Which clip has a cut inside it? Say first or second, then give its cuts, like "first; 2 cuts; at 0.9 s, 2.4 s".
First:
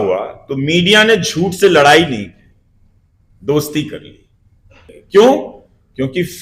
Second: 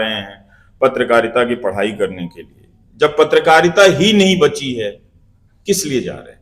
first; 1 cut; at 4.9 s